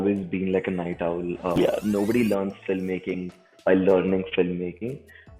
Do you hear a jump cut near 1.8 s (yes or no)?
yes